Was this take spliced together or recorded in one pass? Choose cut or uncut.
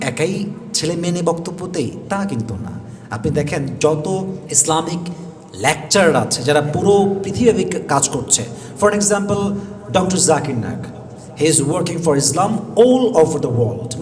uncut